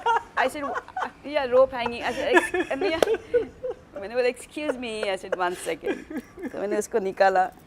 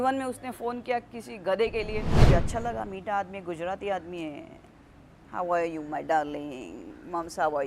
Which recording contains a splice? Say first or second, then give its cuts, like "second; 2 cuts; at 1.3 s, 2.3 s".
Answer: second; 1 cut; at 2.2 s